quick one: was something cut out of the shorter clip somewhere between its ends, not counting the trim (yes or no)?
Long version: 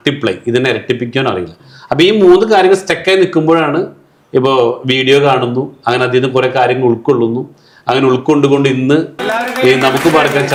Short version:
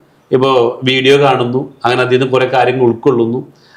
no